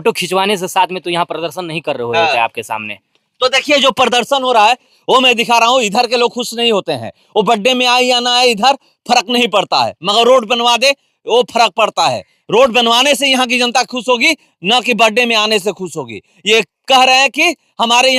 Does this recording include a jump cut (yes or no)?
no